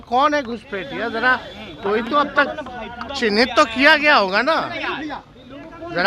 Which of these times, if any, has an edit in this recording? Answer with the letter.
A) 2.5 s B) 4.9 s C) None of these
C